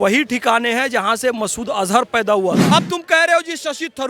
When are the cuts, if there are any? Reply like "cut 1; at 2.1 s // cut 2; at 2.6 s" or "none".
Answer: cut 1; at 2.6 s

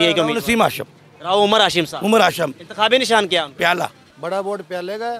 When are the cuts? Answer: cut 1; at 4.1 s

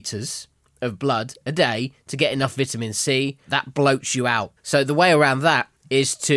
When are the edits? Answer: cut 1; at 3.5 s // cut 2; at 4.5 s

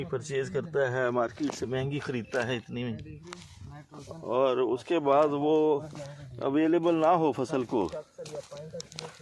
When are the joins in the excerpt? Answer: none

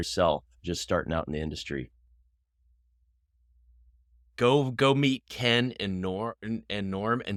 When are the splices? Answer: none

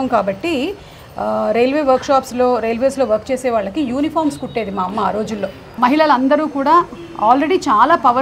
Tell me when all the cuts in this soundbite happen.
cut 1; at 5.8 s

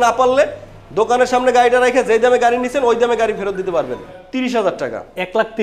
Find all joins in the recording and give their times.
cut 1; at 4.2 s

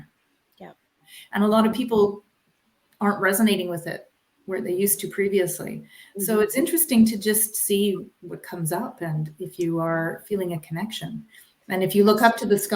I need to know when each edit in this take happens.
cut 1; at 1.1 s

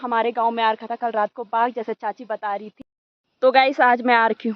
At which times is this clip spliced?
cut 1; at 2.7 s

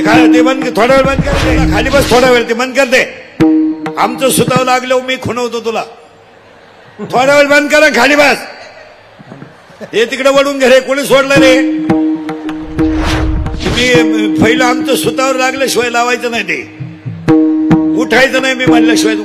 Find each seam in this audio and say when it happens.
cut 1; at 1.3 s // cut 2; at 13.3 s

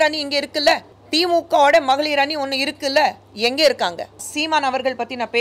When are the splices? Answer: cut 1; at 0.9 s // cut 2; at 4.3 s

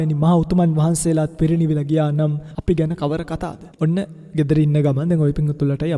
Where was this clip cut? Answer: cut 1; at 2.5 s // cut 2; at 3.6 s

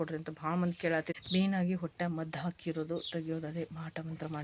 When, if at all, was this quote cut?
cut 1; at 1.1 s

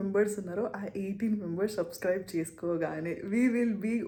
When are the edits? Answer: none

